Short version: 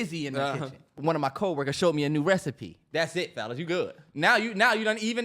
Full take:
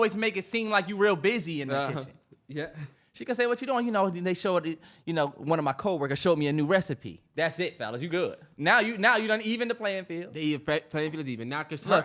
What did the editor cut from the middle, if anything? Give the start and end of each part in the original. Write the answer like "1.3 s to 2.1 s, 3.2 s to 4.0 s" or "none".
2.3 s to 5.4 s